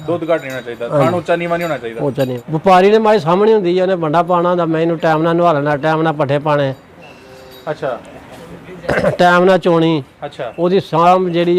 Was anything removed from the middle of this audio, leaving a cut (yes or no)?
yes